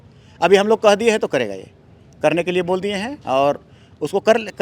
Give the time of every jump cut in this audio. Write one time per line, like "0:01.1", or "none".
none